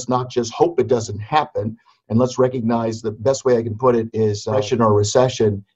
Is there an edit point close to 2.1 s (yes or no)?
no